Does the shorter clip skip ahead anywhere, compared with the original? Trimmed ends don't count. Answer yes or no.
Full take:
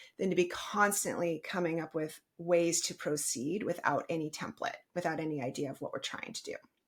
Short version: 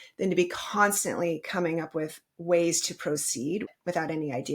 yes